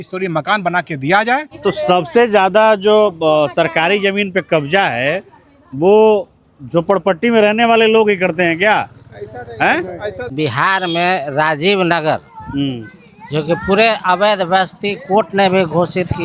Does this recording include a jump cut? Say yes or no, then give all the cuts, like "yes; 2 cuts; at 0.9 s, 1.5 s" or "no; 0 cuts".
yes; 2 cuts; at 1.5 s, 10.3 s